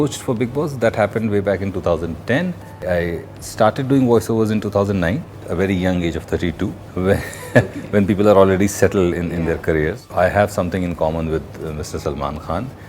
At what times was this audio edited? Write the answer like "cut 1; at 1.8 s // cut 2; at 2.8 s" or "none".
cut 1; at 2.8 s // cut 2; at 5.4 s // cut 3; at 6.8 s // cut 4; at 10.1 s

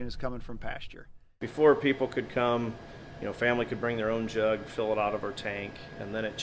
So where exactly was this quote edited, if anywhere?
cut 1; at 1.2 s

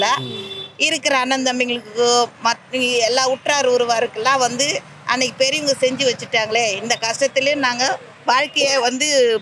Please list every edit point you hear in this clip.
none

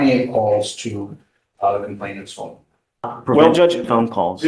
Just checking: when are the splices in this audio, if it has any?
cut 1; at 3.1 s

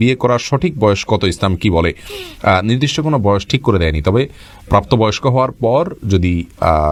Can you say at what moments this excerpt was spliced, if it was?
none

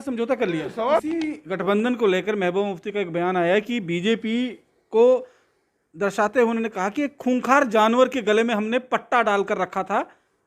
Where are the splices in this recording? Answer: cut 1; at 1.0 s

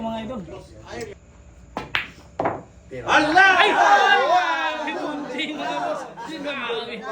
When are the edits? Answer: cut 1; at 1.1 s

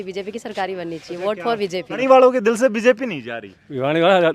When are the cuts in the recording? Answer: cut 1; at 2.0 s

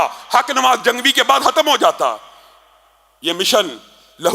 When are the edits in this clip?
none

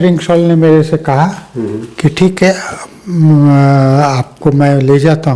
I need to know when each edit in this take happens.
none

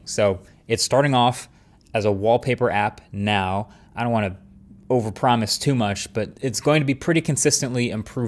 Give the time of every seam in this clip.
none

